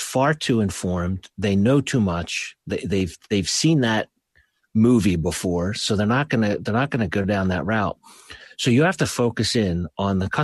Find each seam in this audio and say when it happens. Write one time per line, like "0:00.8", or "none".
none